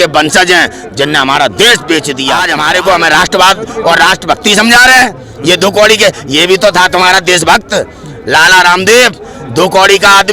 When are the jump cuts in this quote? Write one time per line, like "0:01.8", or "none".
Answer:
0:02.4